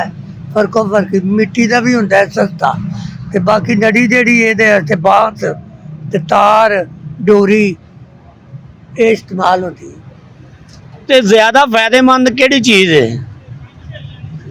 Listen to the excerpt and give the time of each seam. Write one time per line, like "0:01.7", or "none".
none

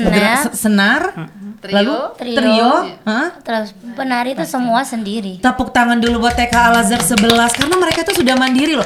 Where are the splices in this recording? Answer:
none

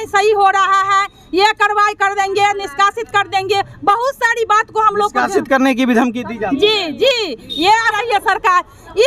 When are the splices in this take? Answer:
0:08.0

